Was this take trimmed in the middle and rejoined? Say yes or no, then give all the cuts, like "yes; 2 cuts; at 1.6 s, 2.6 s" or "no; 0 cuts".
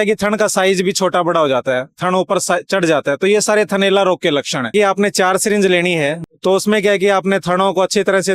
yes; 2 cuts; at 4.7 s, 6.2 s